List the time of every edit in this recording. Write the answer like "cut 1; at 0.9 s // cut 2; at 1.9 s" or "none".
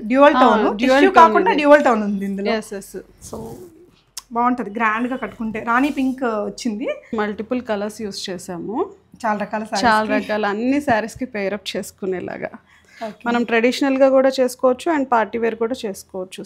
cut 1; at 7.1 s